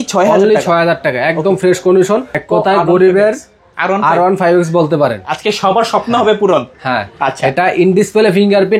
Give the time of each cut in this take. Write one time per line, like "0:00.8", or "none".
0:02.3